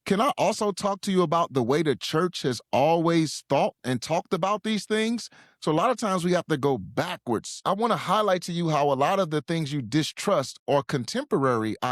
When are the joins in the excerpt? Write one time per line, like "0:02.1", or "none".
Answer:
0:07.5